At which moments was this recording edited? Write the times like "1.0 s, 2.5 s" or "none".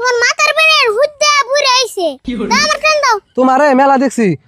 3.3 s